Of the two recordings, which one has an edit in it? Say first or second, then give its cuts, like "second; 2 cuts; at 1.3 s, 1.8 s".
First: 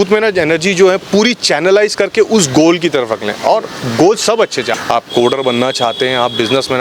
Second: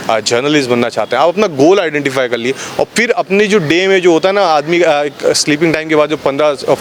first; 1 cut; at 4.7 s